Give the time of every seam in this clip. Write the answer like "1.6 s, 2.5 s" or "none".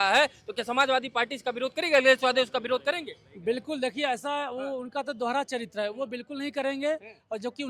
none